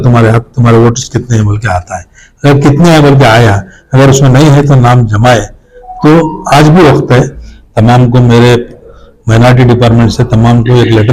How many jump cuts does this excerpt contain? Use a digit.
1